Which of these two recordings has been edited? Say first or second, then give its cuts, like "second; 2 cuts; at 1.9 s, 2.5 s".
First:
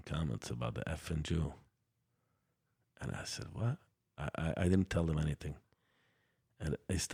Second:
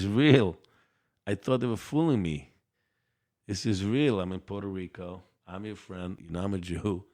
second; 1 cut; at 6.2 s